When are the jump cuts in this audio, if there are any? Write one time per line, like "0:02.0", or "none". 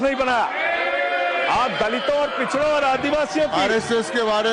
none